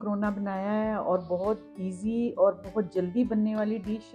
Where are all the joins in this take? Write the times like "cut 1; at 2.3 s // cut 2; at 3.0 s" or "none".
none